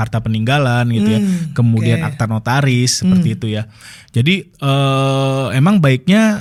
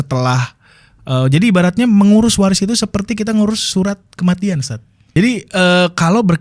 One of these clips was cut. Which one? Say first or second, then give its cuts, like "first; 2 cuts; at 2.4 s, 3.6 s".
second; 1 cut; at 5.0 s